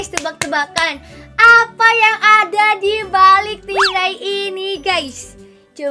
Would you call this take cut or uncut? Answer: uncut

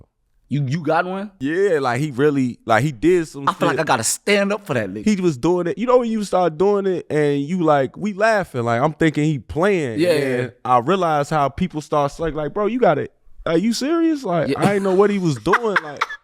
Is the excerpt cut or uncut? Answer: cut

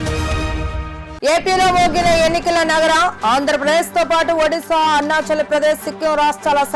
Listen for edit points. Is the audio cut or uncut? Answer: cut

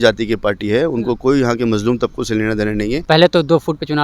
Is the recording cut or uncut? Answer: cut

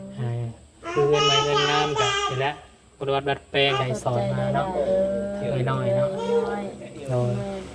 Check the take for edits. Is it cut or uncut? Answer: cut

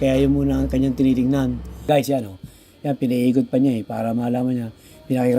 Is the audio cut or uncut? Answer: cut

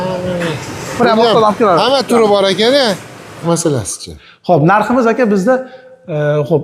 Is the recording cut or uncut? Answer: cut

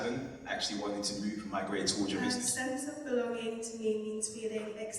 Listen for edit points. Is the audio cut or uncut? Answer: cut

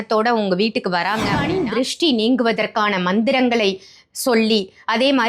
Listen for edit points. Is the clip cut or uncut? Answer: cut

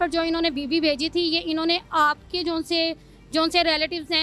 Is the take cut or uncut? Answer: uncut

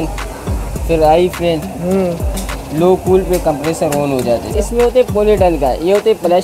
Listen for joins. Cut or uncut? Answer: cut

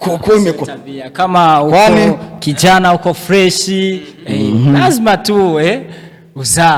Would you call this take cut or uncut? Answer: uncut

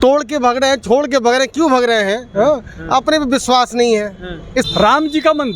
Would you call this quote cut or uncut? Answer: cut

